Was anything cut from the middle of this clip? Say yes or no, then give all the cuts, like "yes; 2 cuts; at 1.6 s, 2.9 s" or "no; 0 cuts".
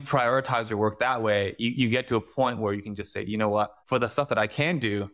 yes; 1 cut; at 3.8 s